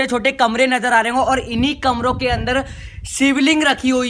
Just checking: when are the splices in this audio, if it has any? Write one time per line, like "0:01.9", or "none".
none